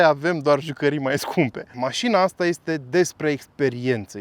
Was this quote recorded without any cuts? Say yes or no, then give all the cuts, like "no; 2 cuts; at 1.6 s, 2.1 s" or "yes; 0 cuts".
no; 1 cut; at 1.7 s